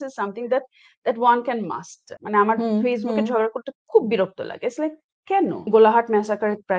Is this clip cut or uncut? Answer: cut